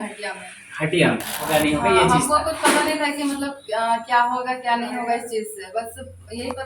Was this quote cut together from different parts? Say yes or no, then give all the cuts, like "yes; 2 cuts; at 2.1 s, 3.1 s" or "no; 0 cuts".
yes; 1 cut; at 1.5 s